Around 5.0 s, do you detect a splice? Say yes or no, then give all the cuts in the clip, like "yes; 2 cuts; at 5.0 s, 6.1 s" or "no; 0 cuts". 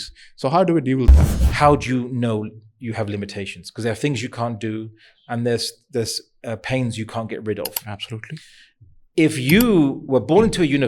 no; 1 cut; at 1.2 s